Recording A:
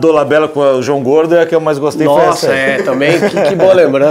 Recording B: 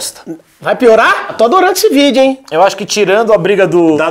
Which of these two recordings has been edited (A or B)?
B